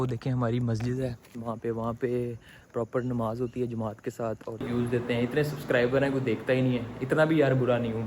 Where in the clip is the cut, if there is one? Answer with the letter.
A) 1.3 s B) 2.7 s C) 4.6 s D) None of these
C